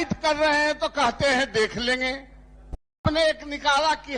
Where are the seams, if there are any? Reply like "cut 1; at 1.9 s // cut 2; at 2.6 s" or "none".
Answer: cut 1; at 3.0 s